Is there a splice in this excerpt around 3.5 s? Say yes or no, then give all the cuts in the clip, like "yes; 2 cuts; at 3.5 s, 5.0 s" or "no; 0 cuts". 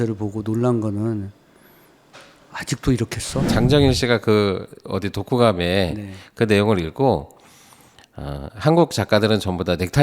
yes; 1 cut; at 3.5 s